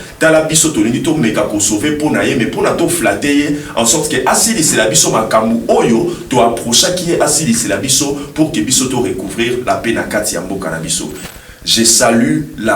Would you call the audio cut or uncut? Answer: cut